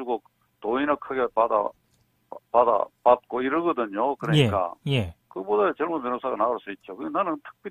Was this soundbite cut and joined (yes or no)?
yes